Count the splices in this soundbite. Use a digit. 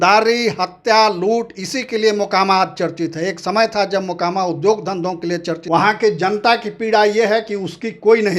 1